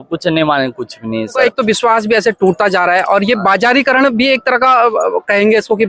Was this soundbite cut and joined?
yes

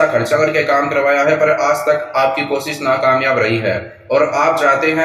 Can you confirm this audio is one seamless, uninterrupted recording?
yes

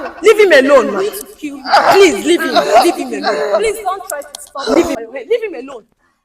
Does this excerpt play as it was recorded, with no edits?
no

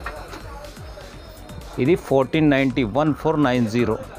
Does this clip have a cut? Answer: no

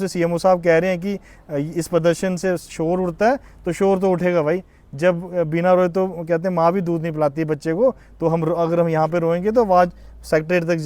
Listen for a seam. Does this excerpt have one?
no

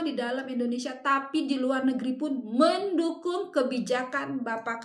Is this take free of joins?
yes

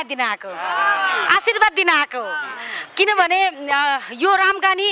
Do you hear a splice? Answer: no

